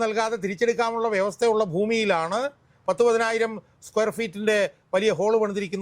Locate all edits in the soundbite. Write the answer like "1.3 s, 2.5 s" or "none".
none